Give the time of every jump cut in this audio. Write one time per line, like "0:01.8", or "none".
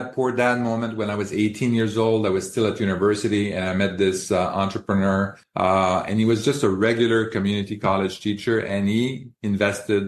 0:05.4